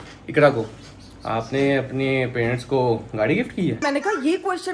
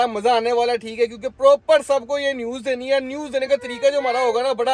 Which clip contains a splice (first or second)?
first